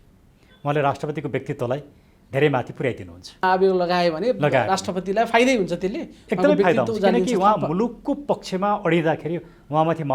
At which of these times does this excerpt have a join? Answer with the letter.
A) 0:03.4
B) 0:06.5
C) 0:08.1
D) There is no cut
A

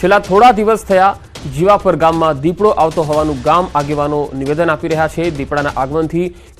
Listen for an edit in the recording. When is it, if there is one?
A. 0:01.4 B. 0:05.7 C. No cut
C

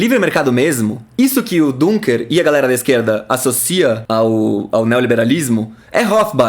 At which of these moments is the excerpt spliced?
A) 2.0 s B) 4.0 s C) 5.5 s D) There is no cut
B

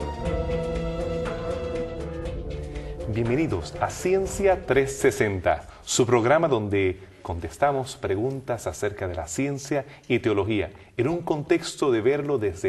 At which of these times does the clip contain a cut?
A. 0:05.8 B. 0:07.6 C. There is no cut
C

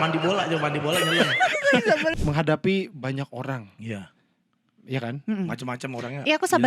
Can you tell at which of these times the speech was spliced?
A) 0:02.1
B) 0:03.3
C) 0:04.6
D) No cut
A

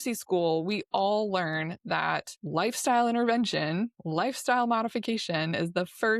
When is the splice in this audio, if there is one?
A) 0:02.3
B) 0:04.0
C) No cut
A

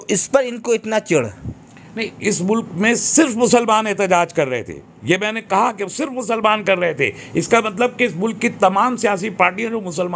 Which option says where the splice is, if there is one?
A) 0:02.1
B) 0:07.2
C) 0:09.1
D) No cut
A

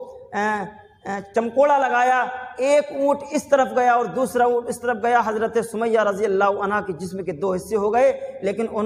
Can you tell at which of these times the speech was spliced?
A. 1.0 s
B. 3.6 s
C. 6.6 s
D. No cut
D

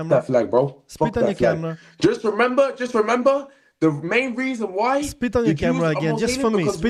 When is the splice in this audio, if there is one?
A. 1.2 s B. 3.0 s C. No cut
C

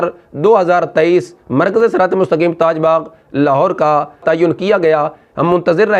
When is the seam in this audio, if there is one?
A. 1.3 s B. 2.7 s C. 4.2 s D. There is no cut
C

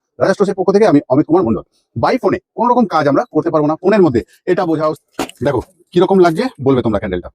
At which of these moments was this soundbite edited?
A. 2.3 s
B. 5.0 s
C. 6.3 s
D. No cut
B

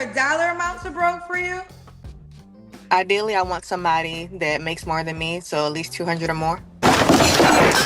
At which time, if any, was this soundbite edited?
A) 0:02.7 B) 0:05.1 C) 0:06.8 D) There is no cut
C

